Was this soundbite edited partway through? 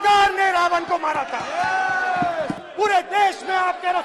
yes; 1 cut; at 2.6 s

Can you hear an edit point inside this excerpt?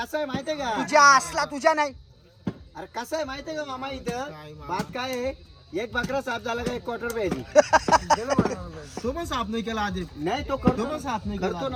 no; 0 cuts

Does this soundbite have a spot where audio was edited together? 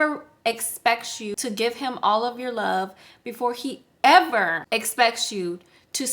yes; 2 cuts; at 1.7 s, 4.6 s

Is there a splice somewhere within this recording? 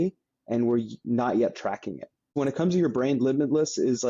yes; 1 cut; at 2.3 s

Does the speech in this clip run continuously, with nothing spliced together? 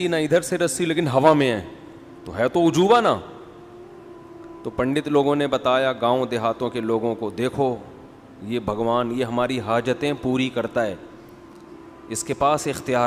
yes; 0 cuts

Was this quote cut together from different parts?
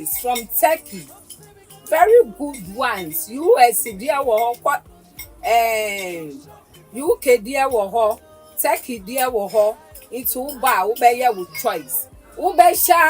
yes; 1 cut; at 10.5 s

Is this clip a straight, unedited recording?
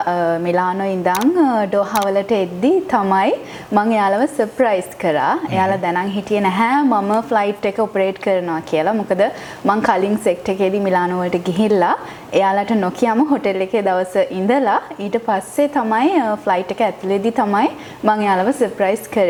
yes; 0 cuts

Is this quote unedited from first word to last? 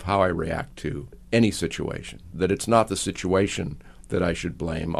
no; 2 cuts; at 1.1 s, 2.3 s

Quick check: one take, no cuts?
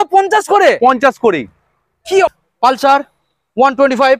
no; 1 cut; at 2.3 s

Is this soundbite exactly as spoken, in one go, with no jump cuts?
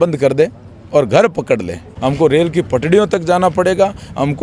no; 1 cut; at 1.9 s

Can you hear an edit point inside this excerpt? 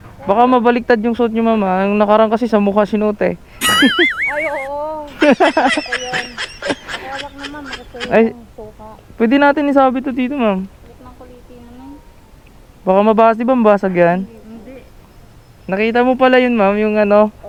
no; 0 cuts

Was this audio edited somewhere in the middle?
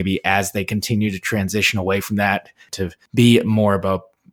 yes; 1 cut; at 2.7 s

